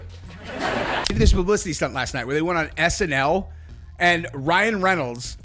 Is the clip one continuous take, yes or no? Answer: no